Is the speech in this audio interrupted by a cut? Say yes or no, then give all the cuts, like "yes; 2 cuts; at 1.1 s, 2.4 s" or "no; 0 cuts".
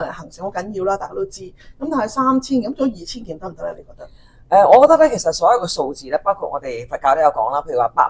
no; 0 cuts